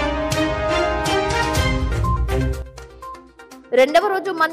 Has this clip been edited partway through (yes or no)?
no